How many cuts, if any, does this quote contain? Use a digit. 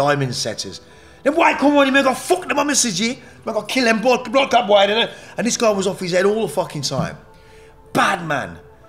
0